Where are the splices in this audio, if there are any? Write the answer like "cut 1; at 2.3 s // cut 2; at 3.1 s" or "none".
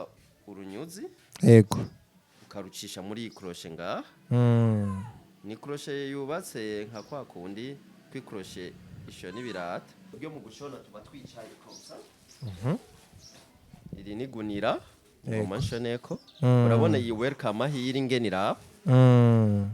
cut 1; at 10.1 s